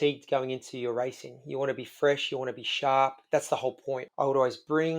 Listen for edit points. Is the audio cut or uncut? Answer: cut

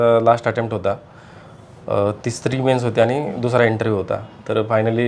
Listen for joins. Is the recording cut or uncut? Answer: uncut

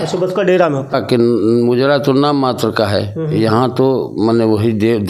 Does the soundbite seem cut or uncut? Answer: cut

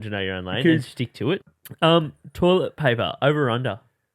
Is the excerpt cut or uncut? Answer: cut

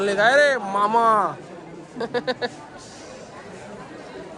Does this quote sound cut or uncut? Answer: uncut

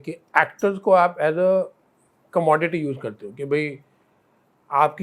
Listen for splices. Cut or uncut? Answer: uncut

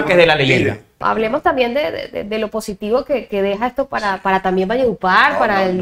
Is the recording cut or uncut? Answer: cut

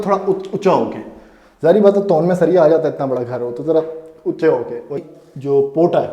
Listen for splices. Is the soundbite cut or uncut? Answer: cut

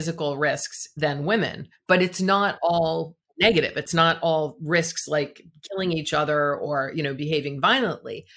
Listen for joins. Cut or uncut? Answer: uncut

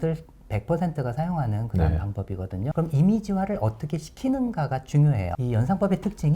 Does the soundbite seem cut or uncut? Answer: cut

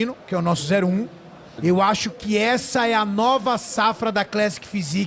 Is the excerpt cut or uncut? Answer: cut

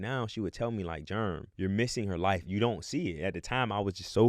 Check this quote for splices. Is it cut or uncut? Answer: cut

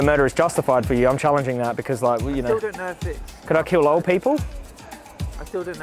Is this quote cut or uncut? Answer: uncut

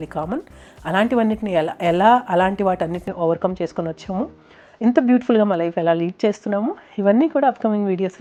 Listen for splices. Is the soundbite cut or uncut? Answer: uncut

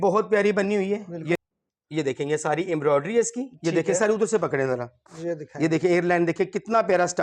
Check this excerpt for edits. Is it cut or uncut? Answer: cut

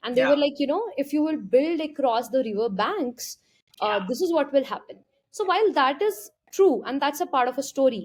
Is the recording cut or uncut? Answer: uncut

